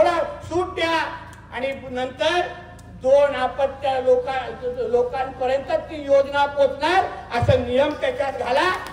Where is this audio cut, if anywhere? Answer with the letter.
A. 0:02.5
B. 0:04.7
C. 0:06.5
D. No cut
D